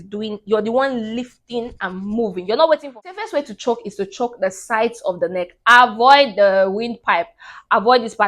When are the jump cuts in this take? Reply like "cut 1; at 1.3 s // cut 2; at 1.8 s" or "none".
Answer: cut 1; at 3.0 s